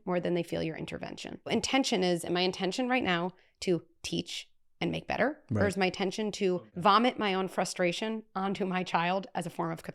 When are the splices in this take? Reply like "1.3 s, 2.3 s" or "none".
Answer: 1.5 s, 6.5 s